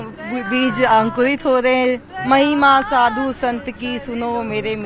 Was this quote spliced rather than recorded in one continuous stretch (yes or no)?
yes